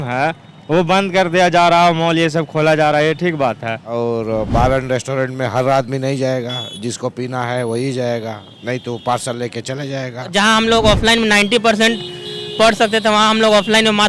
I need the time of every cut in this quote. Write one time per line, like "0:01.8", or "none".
0:03.8
0:10.3